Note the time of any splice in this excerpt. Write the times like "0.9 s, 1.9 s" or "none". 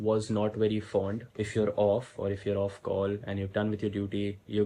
1.2 s